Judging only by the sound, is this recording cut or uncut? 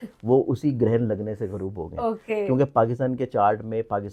uncut